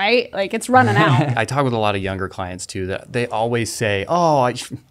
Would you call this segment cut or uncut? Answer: cut